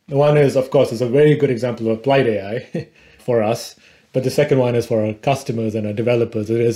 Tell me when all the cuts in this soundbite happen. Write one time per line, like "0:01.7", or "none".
none